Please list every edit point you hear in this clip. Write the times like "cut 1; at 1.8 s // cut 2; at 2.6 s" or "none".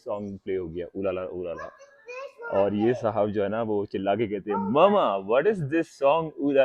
none